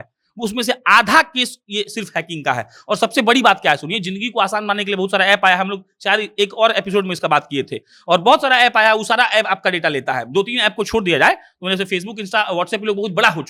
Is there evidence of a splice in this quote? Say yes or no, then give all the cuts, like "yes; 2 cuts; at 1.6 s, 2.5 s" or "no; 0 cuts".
no; 0 cuts